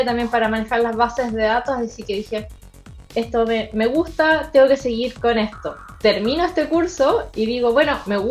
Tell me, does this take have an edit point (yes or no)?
yes